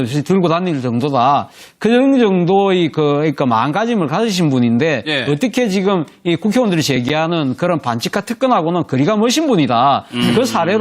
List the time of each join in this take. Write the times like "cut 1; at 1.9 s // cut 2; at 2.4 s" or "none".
cut 1; at 9.2 s